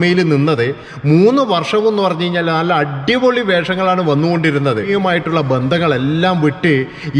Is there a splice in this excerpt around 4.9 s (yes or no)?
yes